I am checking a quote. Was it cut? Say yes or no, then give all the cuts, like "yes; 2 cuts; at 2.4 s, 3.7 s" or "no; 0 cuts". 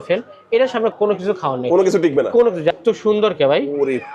yes; 2 cuts; at 0.9 s, 2.7 s